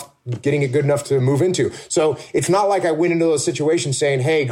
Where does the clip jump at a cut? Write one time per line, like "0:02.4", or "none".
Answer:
none